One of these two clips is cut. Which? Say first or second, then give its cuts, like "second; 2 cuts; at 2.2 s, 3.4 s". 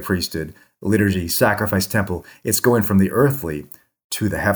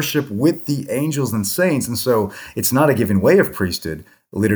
second; 1 cut; at 2.4 s